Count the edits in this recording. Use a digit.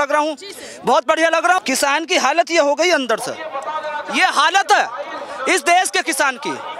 1